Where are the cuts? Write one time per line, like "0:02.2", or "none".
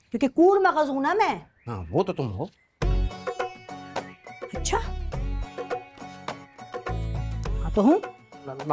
none